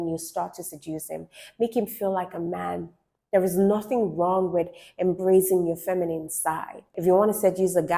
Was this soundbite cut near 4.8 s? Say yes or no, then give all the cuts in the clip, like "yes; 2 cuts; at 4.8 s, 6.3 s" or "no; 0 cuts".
no; 1 cut; at 6.9 s